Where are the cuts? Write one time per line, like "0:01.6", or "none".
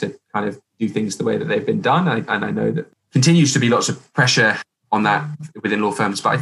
0:02.9